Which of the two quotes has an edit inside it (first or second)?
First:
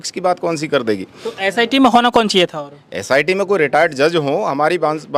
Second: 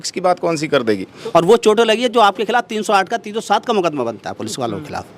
second